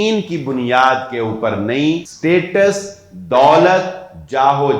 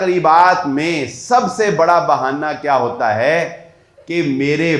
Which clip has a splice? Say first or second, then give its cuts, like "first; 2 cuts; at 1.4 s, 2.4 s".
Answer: first; 1 cut; at 2.1 s